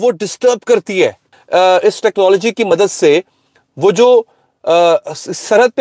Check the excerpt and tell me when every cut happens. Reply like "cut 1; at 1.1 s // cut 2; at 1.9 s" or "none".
cut 1; at 1.3 s